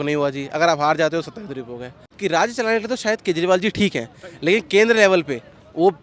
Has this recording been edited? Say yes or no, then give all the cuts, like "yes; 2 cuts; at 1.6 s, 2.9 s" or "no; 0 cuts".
yes; 1 cut; at 2.1 s